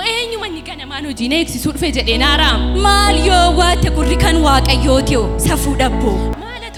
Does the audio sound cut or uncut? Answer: uncut